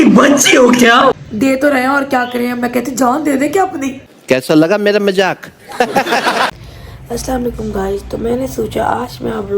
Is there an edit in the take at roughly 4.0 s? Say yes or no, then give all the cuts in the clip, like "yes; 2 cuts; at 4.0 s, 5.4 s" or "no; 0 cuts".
no; 2 cuts; at 1.2 s, 6.6 s